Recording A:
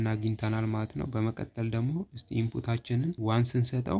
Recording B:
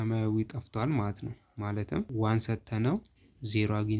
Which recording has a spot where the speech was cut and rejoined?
B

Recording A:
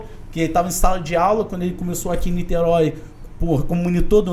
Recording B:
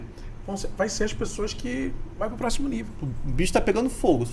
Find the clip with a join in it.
B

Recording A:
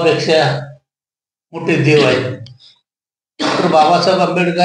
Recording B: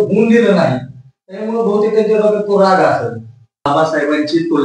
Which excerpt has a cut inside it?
B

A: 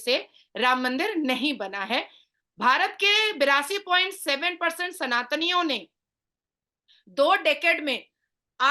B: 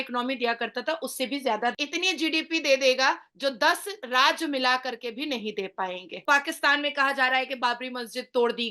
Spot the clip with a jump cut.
B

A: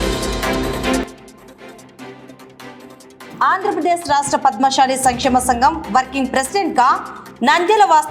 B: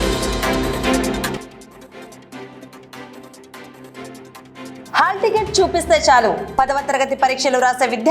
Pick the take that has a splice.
B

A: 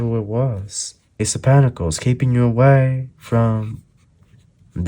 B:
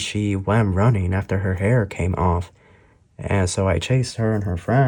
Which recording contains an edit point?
A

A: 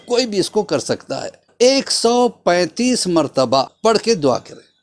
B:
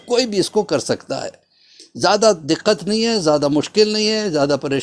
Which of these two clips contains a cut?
A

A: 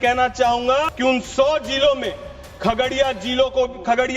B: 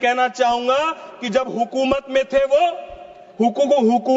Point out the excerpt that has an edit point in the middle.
A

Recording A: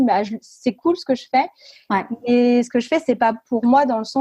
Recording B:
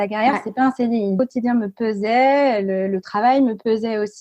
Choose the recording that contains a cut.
B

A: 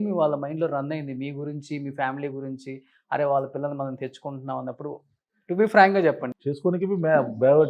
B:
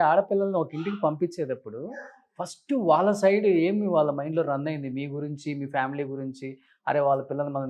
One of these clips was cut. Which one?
A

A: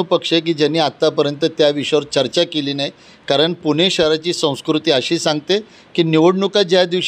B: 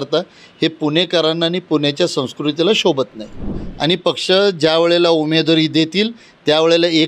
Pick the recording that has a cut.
B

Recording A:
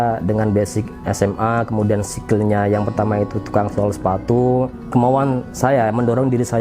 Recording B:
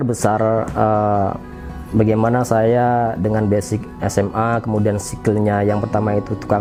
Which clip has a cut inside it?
A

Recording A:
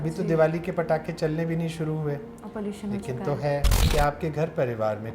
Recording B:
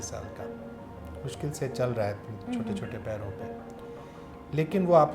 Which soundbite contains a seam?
A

